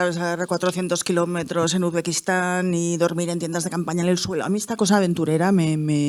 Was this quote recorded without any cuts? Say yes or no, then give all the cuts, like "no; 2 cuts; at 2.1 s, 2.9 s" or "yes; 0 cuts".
yes; 0 cuts